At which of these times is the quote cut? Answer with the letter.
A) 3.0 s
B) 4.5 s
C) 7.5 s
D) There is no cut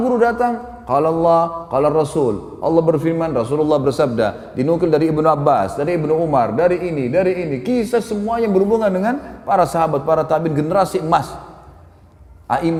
D